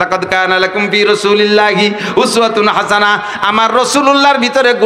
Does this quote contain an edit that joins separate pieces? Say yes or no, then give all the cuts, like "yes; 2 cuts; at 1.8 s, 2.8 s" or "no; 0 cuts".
no; 0 cuts